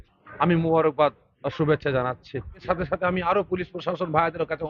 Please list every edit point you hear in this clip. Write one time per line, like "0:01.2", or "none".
0:02.6